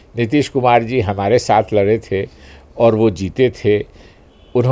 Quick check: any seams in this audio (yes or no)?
no